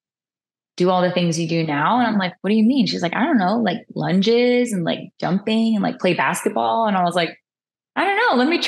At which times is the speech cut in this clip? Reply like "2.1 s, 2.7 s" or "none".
none